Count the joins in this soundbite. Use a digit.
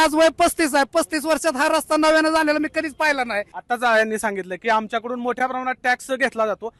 0